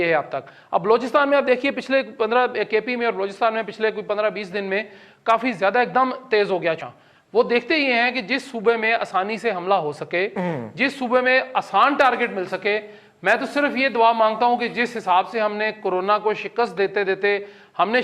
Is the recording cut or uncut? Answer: cut